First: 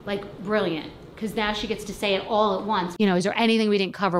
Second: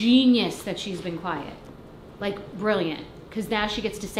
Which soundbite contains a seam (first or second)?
first